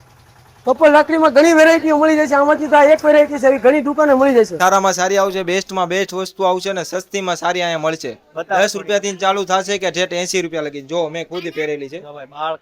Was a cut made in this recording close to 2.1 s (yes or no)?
no